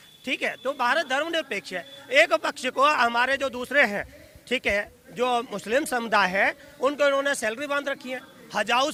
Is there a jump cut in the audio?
no; 0 cuts

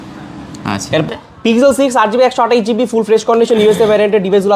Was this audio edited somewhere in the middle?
yes; 1 cut; at 1.1 s

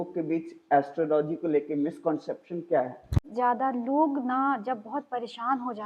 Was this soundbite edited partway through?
yes; 1 cut; at 3.3 s

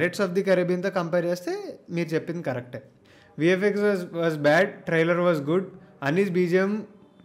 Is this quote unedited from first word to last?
yes; 0 cuts

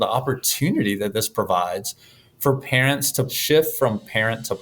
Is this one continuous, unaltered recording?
no; 1 cut; at 3.3 s

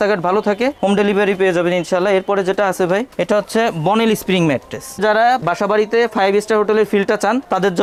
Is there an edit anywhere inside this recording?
no; 0 cuts

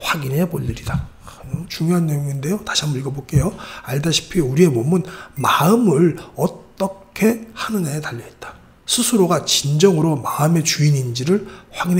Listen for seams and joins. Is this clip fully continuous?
yes; 0 cuts

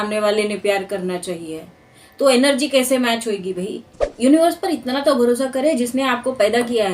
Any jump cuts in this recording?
yes; 1 cut; at 4.0 s

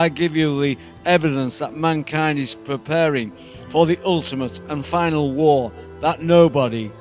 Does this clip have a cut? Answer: yes; 1 cut; at 4.6 s

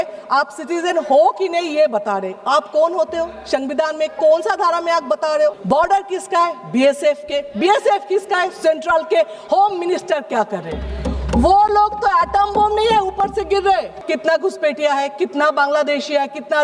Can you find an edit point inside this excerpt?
yes; 2 cuts; at 5.6 s, 14.0 s

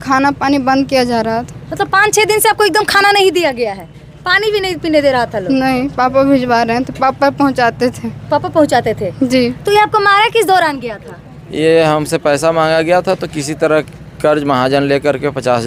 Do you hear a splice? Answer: no; 0 cuts

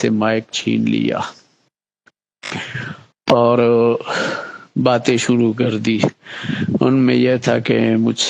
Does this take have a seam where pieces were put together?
no; 0 cuts

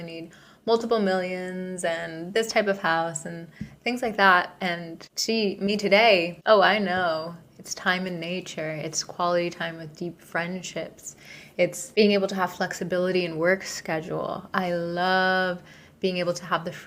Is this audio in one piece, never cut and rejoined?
yes; 0 cuts

